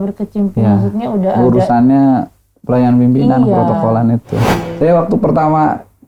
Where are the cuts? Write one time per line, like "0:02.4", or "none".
0:04.4